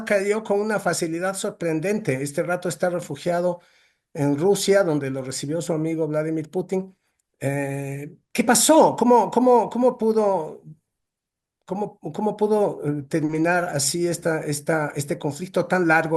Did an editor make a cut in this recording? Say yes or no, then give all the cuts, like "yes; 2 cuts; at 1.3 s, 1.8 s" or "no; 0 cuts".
no; 0 cuts